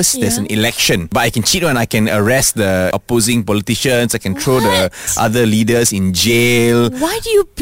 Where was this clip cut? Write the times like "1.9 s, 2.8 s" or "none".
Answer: 1.1 s, 2.9 s